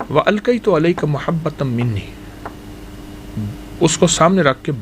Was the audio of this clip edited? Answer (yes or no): no